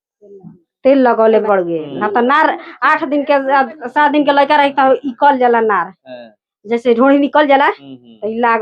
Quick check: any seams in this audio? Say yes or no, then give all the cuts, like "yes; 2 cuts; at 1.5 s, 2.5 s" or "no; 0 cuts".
yes; 1 cut; at 1.4 s